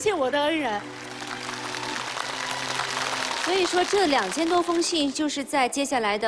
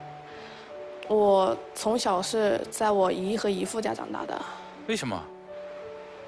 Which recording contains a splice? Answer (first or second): first